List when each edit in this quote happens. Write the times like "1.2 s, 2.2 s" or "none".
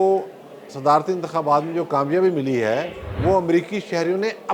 none